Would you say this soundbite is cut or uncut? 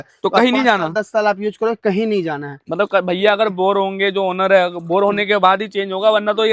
uncut